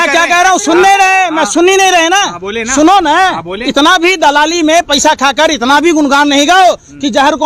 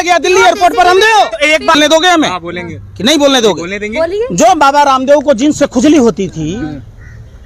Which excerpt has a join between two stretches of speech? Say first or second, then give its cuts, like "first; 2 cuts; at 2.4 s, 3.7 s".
second; 1 cut; at 1.8 s